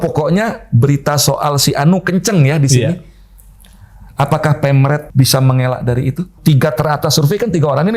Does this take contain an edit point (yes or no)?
yes